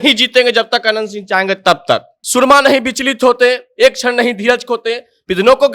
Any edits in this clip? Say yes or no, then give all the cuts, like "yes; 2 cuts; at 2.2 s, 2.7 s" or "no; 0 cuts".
yes; 1 cut; at 2.2 s